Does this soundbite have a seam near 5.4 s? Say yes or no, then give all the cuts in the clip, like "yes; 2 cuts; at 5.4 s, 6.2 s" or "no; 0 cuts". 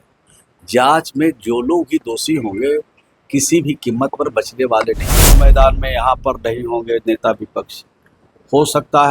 yes; 1 cut; at 5.4 s